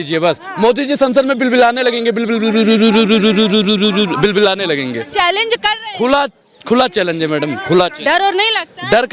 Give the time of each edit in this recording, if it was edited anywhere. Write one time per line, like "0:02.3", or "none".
none